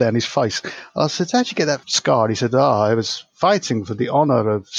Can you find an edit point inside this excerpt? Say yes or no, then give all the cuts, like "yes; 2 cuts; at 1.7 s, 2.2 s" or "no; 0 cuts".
yes; 1 cut; at 1.9 s